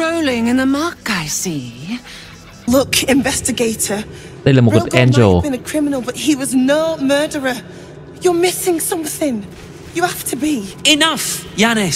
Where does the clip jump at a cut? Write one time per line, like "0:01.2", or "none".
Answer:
0:02.7

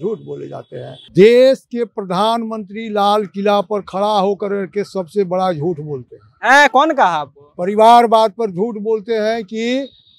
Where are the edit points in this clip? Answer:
0:01.0

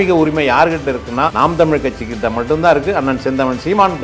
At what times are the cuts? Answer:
0:01.3

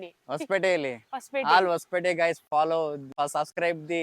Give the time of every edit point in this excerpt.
0:03.1

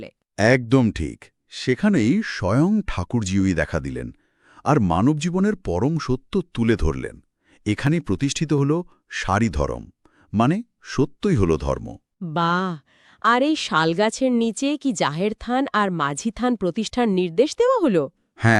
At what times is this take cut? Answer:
none

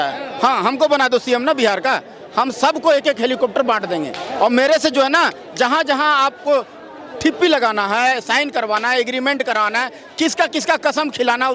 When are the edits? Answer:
none

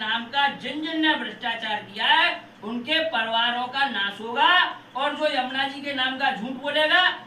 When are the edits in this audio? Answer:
none

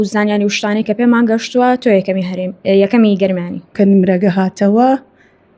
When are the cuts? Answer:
0:03.7

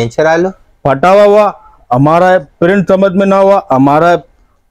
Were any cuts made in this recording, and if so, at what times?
none

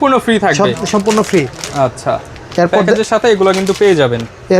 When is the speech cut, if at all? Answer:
none

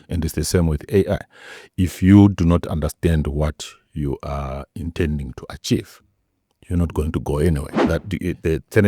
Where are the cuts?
0:07.7

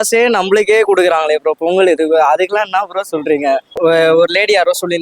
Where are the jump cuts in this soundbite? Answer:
0:03.7

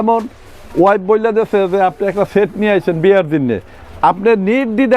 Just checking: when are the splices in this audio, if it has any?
none

